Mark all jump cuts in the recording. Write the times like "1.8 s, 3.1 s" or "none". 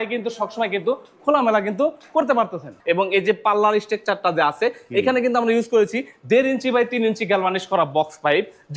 2.7 s